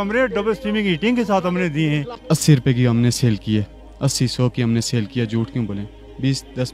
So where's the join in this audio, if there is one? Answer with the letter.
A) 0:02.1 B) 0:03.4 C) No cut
A